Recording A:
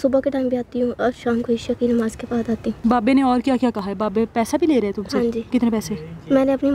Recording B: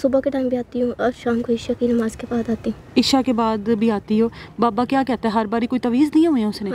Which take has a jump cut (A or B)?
A